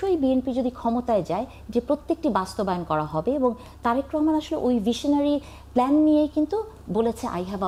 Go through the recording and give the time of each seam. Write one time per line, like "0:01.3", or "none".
none